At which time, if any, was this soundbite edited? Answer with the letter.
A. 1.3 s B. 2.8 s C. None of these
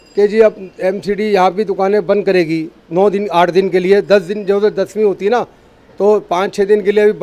C